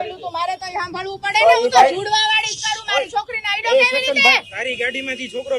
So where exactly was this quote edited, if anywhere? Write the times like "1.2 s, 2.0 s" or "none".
4.5 s